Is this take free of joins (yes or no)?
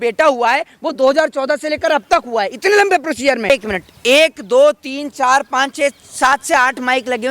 no